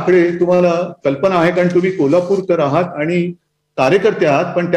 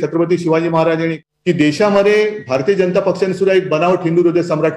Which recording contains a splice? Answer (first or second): second